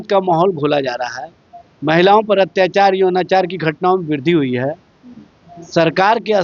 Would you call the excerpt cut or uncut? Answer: uncut